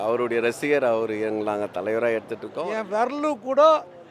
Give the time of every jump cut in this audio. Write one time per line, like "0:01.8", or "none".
0:02.6